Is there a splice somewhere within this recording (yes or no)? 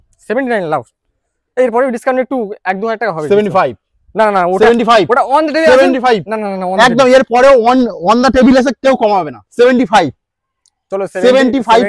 no